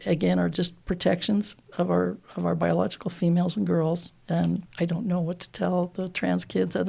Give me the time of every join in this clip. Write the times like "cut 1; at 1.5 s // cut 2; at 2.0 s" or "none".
cut 1; at 4.6 s